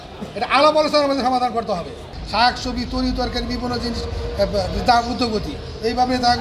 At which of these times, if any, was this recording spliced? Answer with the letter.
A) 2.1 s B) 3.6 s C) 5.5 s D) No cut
A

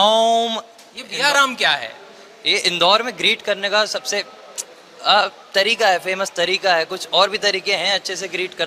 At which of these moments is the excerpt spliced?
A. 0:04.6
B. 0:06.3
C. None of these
C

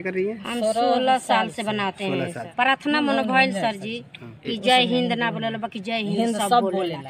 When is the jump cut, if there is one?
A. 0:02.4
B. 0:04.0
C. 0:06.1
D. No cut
A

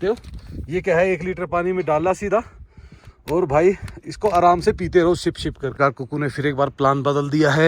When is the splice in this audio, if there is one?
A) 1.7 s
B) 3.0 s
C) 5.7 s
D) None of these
C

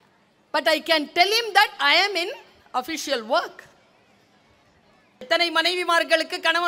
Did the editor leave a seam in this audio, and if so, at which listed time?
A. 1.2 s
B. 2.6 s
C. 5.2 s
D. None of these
C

